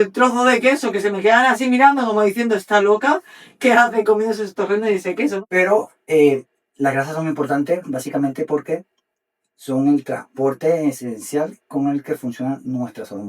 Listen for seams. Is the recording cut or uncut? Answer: cut